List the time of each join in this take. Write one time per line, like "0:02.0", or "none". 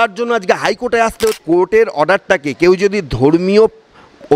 0:01.4